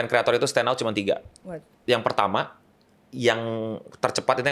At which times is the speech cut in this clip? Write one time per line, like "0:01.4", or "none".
none